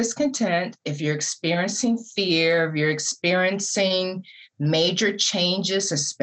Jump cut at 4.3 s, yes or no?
no